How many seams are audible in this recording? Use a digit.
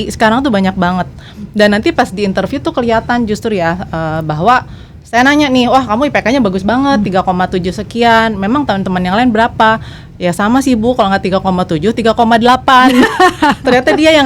0